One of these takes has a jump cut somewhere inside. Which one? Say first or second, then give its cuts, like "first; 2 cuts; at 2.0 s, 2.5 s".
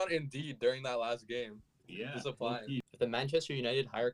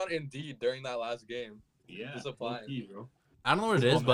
first; 1 cut; at 2.9 s